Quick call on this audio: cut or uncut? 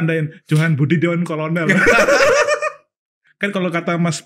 cut